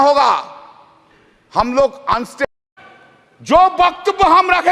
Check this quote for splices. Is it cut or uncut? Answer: cut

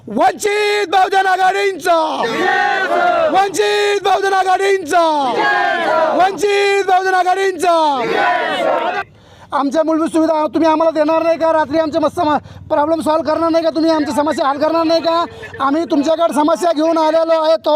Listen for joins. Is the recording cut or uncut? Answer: cut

